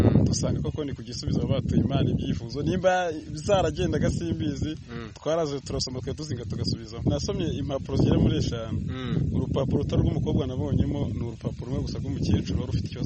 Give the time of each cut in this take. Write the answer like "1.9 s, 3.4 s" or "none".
7.0 s